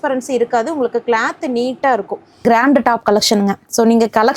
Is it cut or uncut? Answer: cut